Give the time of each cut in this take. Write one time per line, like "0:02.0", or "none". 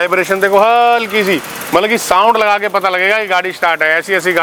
none